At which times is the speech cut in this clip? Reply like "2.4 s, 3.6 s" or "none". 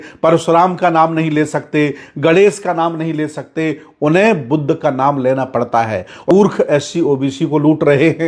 6.3 s